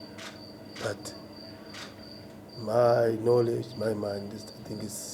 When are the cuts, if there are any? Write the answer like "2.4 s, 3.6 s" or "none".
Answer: none